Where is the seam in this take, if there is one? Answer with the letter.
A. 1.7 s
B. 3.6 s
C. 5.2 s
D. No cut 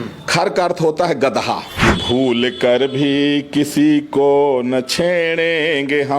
A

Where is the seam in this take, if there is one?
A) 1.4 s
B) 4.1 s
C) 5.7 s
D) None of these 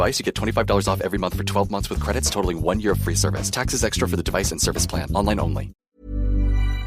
C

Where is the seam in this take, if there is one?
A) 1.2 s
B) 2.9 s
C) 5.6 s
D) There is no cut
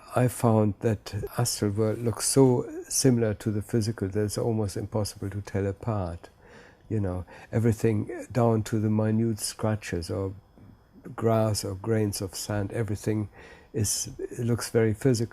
A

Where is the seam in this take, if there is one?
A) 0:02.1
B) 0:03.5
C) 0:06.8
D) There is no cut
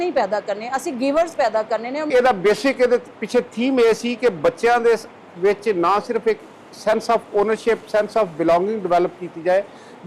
A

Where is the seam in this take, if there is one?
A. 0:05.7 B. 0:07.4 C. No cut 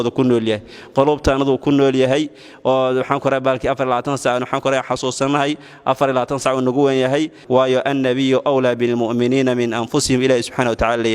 B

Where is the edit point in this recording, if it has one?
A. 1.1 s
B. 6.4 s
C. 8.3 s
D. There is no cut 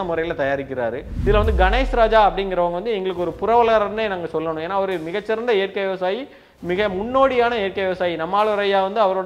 A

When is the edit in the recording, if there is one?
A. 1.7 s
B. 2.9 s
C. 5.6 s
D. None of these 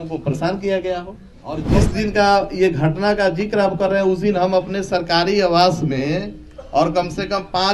A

